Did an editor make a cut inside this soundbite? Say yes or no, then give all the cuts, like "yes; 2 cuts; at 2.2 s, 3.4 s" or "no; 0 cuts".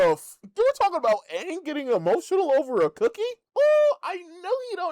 yes; 1 cut; at 3.4 s